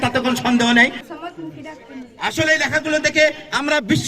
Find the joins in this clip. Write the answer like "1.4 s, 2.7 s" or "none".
1.1 s